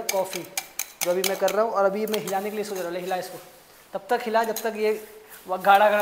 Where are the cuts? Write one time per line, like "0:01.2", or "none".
none